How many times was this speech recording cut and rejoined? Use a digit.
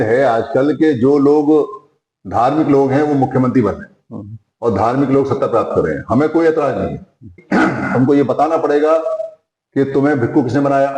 1